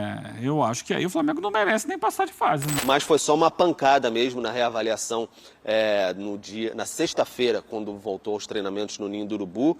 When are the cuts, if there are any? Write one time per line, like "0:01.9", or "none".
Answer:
0:02.7